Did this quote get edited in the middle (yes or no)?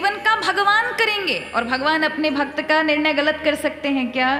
no